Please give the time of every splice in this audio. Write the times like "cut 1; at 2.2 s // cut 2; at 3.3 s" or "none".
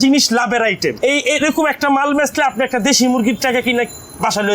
cut 1; at 1.0 s

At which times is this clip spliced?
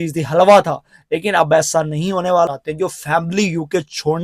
cut 1; at 2.5 s

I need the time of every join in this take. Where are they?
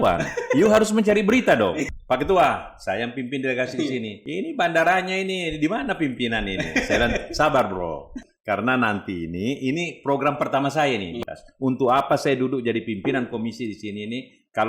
cut 1; at 1.8 s // cut 2; at 4.2 s // cut 3; at 8.1 s // cut 4; at 11.1 s

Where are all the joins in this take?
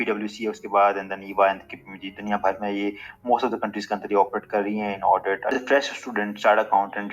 cut 1; at 5.6 s

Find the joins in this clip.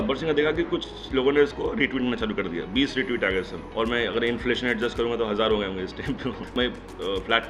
cut 1; at 6.5 s

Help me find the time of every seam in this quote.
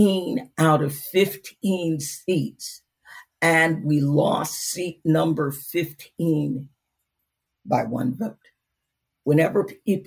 cut 1; at 9.1 s

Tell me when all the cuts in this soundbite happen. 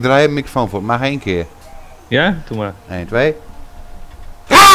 none

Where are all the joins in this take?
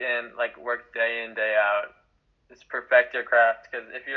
none

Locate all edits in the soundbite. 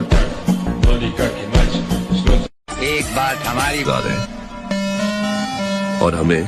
cut 1; at 2.6 s

